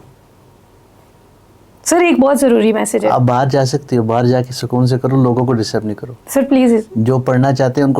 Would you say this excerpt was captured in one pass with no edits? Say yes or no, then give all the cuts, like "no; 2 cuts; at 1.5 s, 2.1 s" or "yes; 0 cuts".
yes; 0 cuts